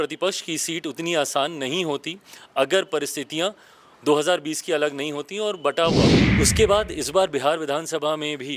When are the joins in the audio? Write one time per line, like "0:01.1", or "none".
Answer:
0:06.2

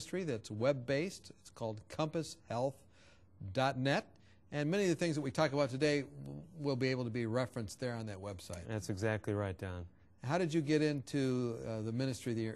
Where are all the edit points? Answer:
none

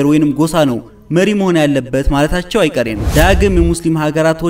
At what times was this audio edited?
0:03.0

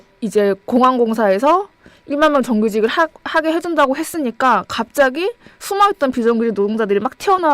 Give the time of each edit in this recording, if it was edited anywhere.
0:03.5

